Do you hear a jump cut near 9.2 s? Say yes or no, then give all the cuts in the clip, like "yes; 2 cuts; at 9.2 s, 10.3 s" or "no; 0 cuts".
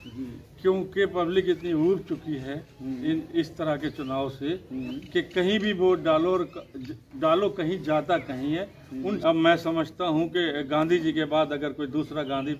yes; 1 cut; at 9.2 s